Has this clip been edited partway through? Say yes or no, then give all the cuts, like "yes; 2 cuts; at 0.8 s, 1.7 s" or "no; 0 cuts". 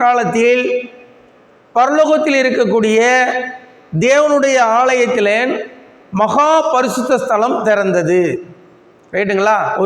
no; 0 cuts